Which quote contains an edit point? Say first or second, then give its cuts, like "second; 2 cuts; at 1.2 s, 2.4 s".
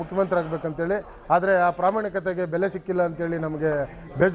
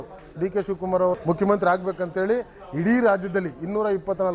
second; 1 cut; at 1.2 s